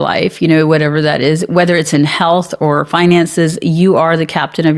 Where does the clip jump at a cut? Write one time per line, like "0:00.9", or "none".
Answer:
none